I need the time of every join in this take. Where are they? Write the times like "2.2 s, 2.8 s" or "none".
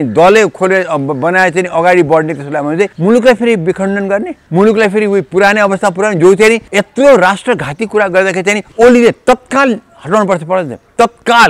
2.9 s, 4.4 s, 6.7 s, 8.6 s